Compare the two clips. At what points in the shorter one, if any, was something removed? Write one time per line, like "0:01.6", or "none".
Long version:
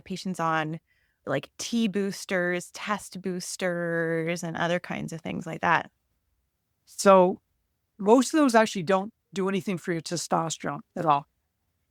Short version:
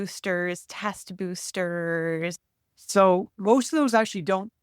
0:02.4
0:03.3

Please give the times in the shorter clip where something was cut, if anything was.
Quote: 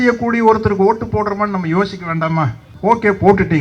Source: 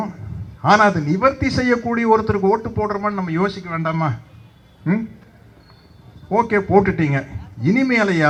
0:02.6

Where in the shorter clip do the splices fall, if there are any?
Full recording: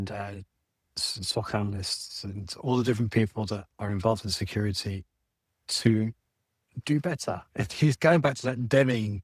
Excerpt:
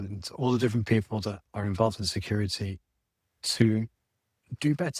none

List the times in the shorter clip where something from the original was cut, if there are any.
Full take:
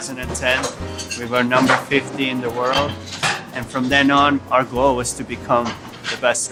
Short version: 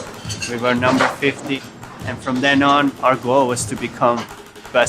0:01.6

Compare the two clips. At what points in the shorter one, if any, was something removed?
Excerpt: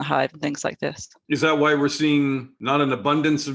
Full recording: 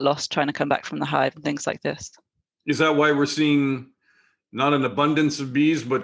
0:01.1
0:02.5

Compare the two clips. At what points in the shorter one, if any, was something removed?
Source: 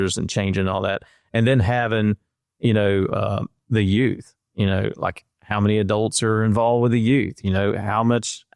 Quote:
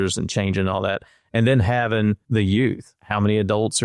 0:02.2
0:02.9

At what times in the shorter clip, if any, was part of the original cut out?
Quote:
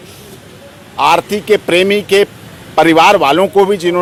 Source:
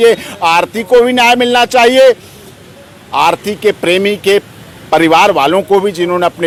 none

